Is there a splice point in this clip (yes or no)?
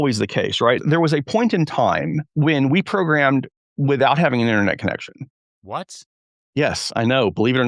yes